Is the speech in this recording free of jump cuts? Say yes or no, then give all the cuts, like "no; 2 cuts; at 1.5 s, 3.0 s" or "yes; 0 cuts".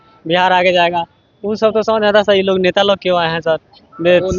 yes; 0 cuts